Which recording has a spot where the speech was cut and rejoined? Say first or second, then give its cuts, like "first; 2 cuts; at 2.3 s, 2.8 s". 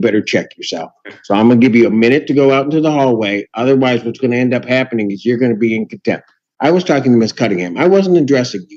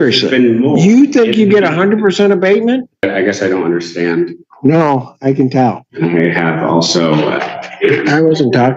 second; 2 cuts; at 3.0 s, 5.9 s